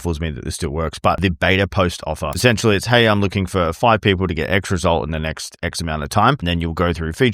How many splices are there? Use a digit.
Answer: 3